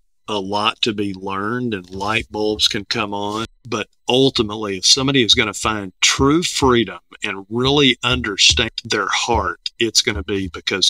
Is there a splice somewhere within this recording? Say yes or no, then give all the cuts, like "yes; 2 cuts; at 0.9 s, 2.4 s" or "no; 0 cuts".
yes; 2 cuts; at 3.6 s, 8.7 s